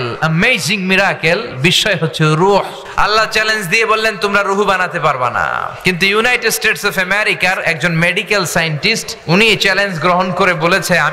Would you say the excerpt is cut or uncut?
cut